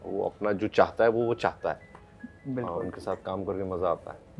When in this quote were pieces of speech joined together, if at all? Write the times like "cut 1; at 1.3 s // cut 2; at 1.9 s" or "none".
none

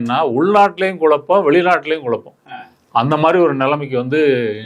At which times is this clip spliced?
none

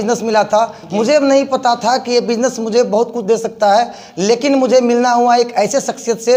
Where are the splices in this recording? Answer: none

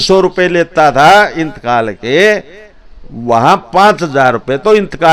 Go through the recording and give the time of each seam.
none

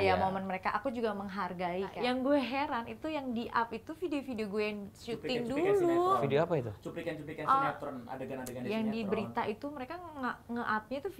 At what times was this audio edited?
cut 1; at 2.0 s

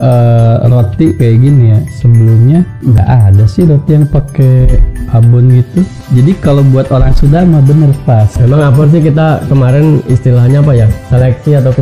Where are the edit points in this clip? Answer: cut 1; at 3.0 s // cut 2; at 6.0 s // cut 3; at 8.3 s

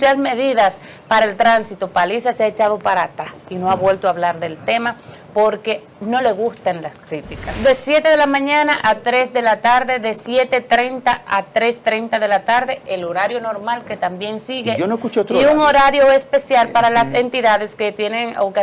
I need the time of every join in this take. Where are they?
cut 1; at 7.5 s

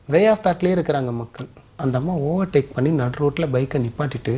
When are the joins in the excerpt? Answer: cut 1; at 1.8 s

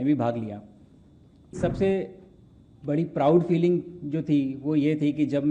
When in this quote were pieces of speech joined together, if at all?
cut 1; at 1.6 s

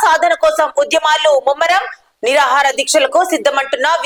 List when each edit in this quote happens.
none

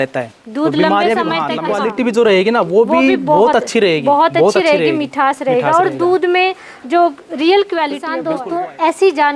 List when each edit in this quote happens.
cut 1; at 1.6 s // cut 2; at 8.2 s

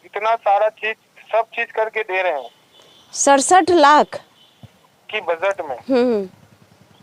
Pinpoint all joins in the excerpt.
none

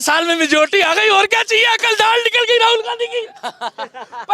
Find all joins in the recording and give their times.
none

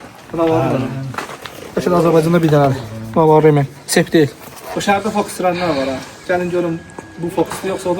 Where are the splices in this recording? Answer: cut 1; at 4.6 s

